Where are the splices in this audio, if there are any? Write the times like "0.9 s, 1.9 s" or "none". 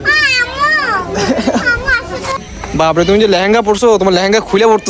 2.5 s